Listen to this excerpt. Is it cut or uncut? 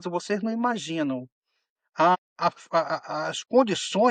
cut